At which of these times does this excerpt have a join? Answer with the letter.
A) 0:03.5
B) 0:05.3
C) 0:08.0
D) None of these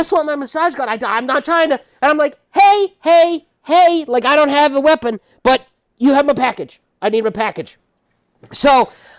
D